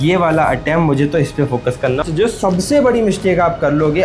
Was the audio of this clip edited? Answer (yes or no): yes